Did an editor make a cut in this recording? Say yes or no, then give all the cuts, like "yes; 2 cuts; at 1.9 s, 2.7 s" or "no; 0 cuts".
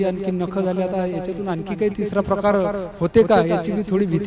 no; 0 cuts